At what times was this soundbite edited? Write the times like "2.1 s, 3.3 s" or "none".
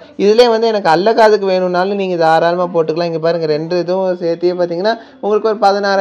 none